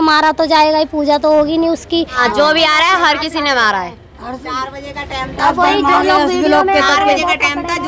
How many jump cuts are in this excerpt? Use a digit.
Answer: 1